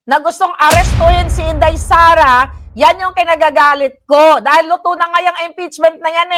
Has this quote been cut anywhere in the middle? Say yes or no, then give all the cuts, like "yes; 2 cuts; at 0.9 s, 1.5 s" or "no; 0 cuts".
no; 0 cuts